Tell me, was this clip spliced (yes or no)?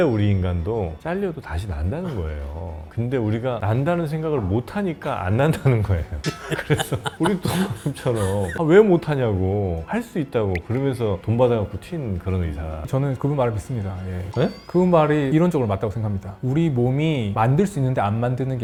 no